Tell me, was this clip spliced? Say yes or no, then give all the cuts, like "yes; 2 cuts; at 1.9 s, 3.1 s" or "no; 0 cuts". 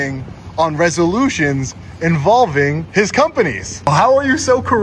yes; 2 cuts; at 2.8 s, 3.9 s